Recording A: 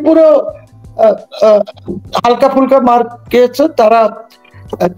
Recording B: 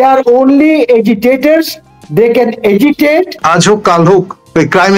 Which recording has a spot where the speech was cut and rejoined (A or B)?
B